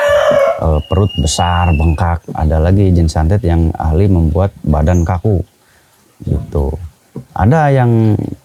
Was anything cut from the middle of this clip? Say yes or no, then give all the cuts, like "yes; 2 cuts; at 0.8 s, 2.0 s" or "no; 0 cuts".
no; 0 cuts